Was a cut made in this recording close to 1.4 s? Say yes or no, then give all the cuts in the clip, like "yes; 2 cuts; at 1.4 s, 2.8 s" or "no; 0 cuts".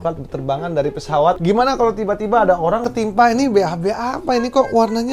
yes; 2 cuts; at 1.4 s, 2.9 s